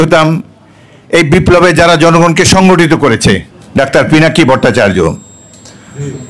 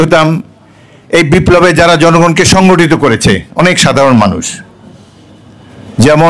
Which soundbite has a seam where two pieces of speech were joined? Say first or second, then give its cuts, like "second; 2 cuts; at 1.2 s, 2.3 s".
first; 1 cut; at 3.5 s